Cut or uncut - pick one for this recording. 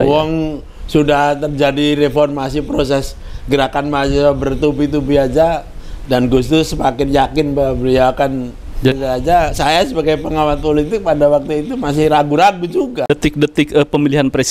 cut